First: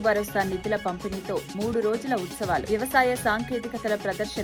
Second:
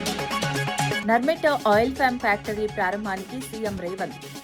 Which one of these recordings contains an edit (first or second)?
second